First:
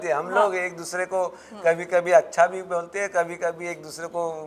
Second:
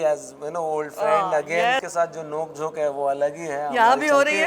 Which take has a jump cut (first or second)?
second